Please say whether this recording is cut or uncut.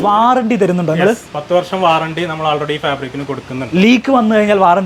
uncut